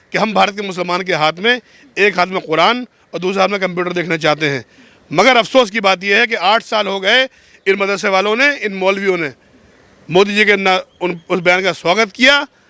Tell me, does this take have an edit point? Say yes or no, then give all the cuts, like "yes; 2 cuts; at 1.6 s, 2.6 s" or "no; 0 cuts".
no; 0 cuts